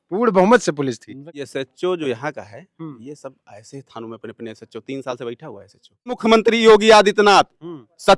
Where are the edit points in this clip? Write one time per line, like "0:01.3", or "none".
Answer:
0:01.3
0:06.2